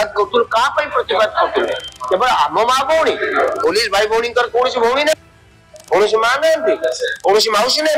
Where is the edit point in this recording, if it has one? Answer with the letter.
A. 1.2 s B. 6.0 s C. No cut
C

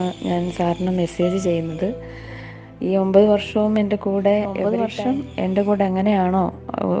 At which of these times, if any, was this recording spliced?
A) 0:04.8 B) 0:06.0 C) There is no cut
A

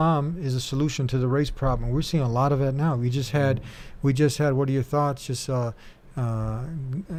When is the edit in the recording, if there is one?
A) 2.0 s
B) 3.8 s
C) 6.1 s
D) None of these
D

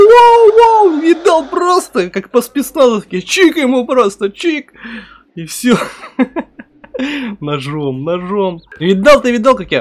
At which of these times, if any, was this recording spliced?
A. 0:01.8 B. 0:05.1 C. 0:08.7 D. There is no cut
C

